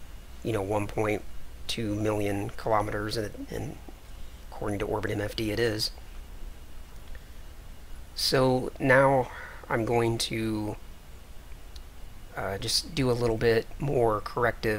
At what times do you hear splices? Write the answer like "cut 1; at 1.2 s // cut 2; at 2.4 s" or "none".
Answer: cut 1; at 5.5 s